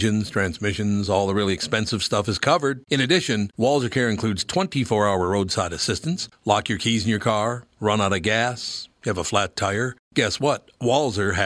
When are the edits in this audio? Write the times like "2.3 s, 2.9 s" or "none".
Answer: none